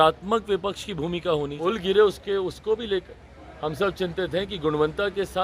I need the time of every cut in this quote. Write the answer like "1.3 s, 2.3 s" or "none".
1.5 s

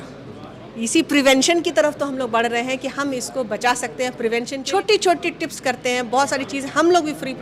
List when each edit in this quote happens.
4.6 s

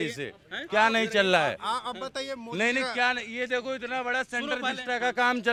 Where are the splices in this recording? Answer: none

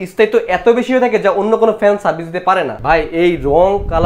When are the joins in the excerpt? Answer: 2.8 s

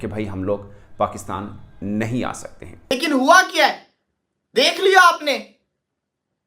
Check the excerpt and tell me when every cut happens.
2.9 s

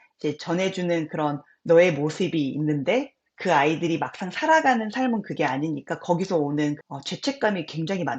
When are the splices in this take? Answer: 6.8 s

